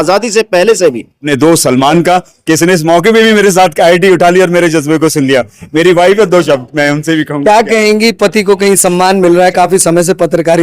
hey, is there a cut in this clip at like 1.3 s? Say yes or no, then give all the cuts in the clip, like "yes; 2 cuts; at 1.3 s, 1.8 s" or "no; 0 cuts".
yes; 1 cut; at 1.3 s